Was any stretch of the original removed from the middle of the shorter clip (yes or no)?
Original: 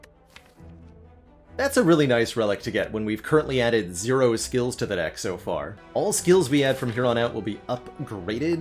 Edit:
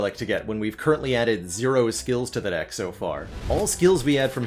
no